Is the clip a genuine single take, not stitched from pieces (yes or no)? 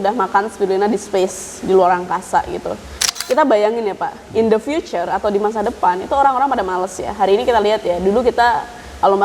no